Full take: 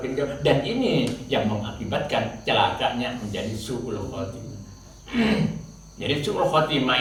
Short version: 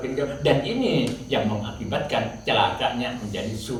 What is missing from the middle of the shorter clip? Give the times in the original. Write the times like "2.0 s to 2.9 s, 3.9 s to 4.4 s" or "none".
none